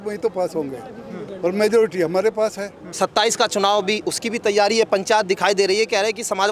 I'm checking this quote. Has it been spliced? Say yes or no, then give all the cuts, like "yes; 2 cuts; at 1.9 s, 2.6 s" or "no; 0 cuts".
yes; 1 cut; at 2.8 s